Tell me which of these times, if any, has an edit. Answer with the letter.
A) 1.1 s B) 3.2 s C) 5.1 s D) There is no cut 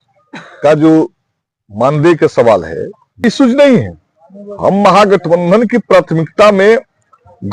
B